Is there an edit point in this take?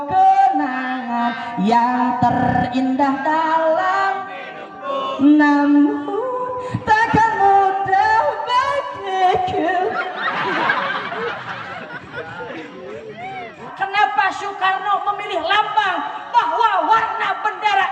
yes; 1 cut; at 13.6 s

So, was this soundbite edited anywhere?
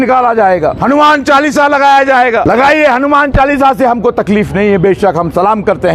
yes; 2 cuts; at 0.8 s, 2.4 s

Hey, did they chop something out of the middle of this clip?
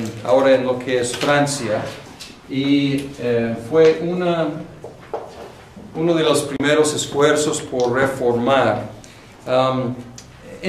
no; 0 cuts

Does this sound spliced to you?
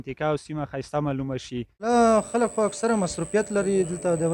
yes; 1 cut; at 1.9 s

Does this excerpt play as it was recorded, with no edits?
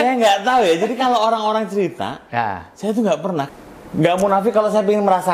no; 1 cut; at 3.5 s

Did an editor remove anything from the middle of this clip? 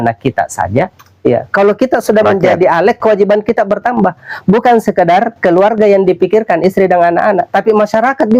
no; 0 cuts

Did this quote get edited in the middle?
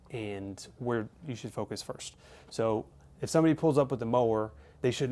no; 0 cuts

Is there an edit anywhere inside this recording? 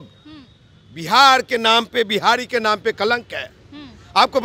no; 0 cuts

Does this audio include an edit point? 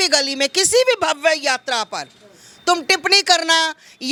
no; 0 cuts

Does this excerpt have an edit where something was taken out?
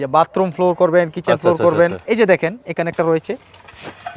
yes; 1 cut; at 2.0 s

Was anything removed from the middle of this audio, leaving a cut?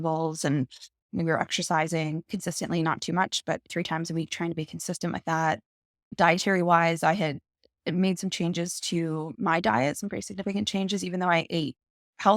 yes; 2 cuts; at 1.1 s, 2.3 s

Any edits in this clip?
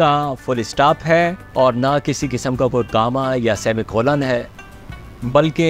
no; 0 cuts

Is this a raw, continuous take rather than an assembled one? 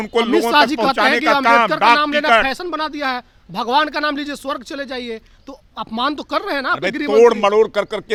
yes; 0 cuts

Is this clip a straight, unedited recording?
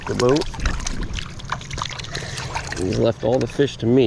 yes; 0 cuts

